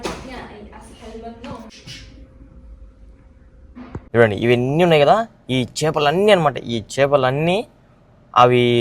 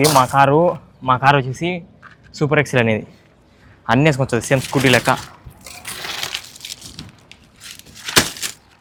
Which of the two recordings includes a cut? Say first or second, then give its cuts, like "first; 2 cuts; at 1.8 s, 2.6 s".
first; 2 cuts; at 1.7 s, 4.1 s